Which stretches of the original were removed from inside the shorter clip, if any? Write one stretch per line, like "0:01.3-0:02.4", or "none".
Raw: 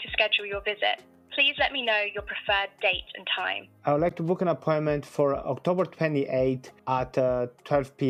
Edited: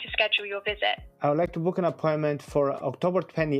0:01.1-0:03.7